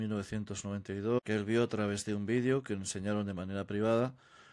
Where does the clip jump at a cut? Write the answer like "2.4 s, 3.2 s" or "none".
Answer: 1.2 s